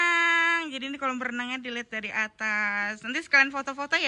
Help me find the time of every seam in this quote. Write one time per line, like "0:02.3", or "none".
none